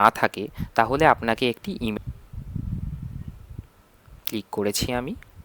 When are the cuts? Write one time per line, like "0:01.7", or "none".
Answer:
0:01.9